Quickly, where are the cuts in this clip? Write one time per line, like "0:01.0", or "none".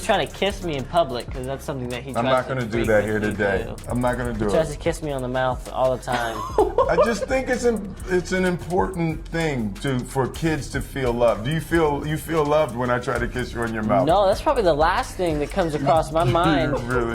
none